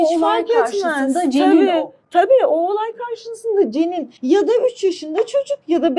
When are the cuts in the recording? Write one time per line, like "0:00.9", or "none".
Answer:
0:04.1